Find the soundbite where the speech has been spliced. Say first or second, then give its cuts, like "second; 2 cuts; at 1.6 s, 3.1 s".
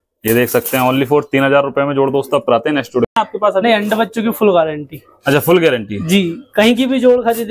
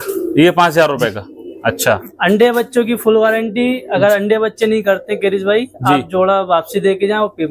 first; 1 cut; at 3.2 s